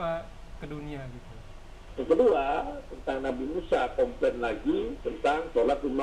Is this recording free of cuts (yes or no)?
no